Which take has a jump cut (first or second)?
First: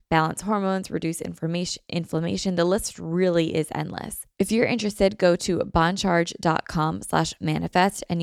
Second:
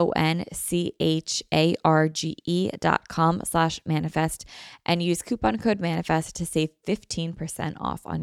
first